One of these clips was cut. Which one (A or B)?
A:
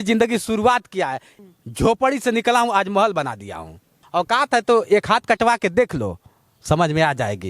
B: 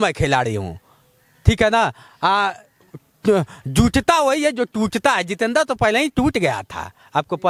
A